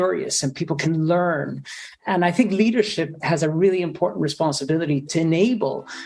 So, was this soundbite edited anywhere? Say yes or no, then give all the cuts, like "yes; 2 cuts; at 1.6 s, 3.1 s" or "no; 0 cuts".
no; 0 cuts